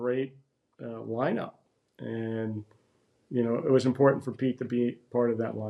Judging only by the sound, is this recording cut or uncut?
uncut